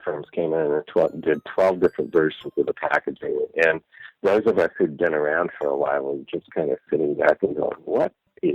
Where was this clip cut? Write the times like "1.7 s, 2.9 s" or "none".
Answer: none

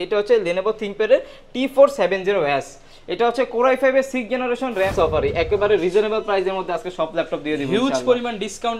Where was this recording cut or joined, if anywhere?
4.9 s

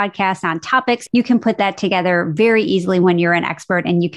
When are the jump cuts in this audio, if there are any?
1.0 s

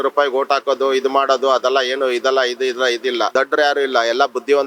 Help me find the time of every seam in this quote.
3.3 s

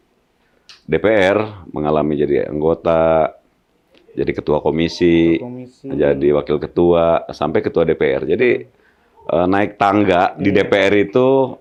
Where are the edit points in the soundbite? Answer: none

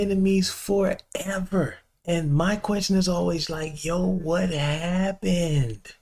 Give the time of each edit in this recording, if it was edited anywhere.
1.9 s

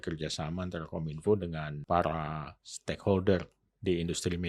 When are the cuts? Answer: 1.7 s

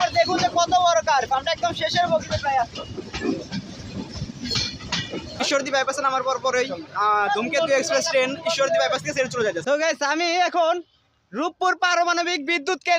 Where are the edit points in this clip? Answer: 5.4 s, 9.6 s

